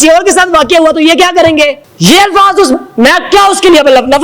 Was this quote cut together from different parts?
yes; 1 cut; at 1.9 s

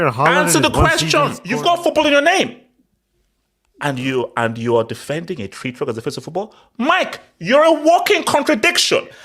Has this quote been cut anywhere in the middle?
yes; 1 cut; at 1.4 s

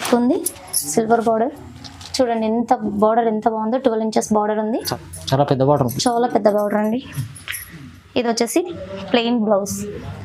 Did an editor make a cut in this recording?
yes; 1 cut; at 4.9 s

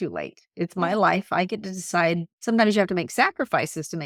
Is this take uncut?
yes; 0 cuts

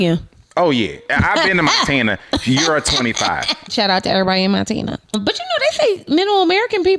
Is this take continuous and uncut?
no; 3 cuts; at 1.0 s, 3.7 s, 5.2 s

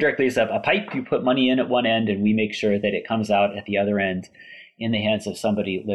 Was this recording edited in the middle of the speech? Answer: no; 0 cuts

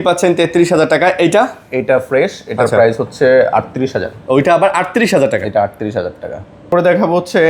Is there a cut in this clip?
no; 0 cuts

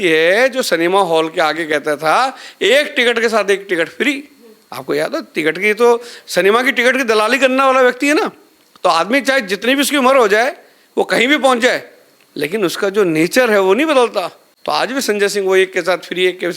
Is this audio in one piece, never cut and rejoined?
yes; 0 cuts

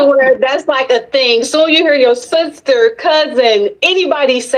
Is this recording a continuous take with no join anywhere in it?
yes; 0 cuts

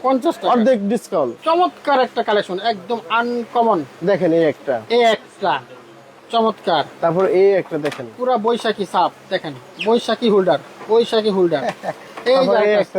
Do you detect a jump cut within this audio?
yes; 1 cut; at 1.4 s

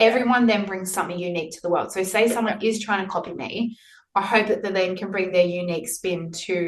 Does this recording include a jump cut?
no; 0 cuts

